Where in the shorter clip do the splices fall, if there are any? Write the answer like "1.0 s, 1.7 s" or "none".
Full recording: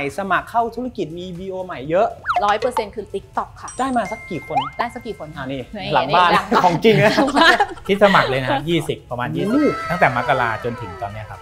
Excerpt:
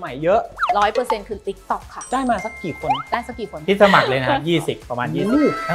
3.6 s